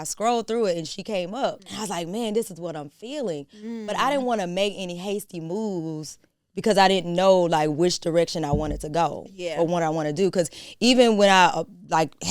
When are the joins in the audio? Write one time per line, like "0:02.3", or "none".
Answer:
0:01.7